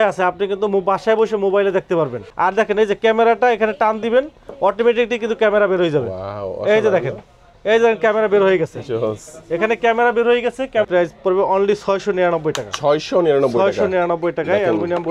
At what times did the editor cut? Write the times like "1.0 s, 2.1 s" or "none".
2.2 s, 10.9 s